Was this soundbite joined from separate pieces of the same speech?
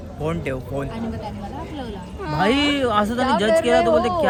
no; 0 cuts

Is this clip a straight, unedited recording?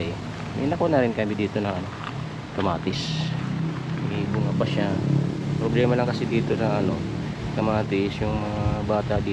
yes; 0 cuts

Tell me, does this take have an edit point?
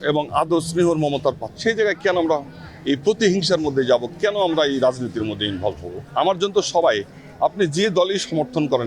yes; 2 cuts; at 1.5 s, 5.9 s

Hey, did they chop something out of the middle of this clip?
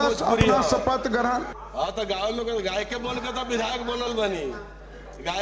yes; 1 cut; at 1.5 s

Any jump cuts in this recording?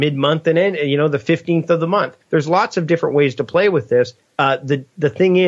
yes; 2 cuts; at 2.2 s, 4.2 s

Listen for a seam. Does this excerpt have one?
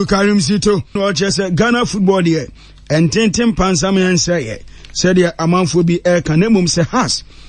yes; 1 cut; at 1.0 s

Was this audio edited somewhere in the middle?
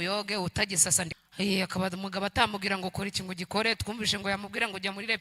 yes; 1 cut; at 1.2 s

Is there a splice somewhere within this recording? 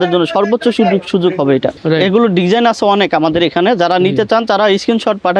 yes; 1 cut; at 1.7 s

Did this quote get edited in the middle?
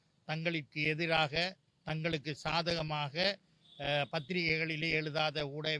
no; 0 cuts

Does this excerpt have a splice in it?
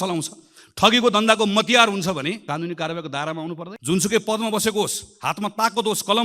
yes; 2 cuts; at 2.4 s, 3.7 s

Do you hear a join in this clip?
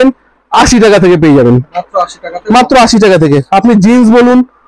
no; 0 cuts

